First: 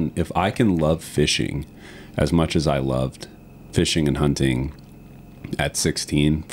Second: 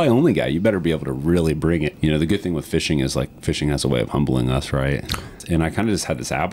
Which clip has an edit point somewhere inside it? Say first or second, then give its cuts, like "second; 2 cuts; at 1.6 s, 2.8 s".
second; 2 cuts; at 1.9 s, 5.4 s